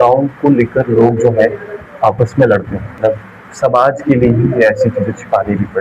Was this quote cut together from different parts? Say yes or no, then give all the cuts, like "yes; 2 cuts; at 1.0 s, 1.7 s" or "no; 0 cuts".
yes; 1 cut; at 2.9 s